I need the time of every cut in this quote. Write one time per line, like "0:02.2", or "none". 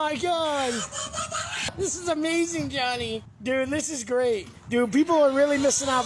0:01.7
0:03.3
0:04.5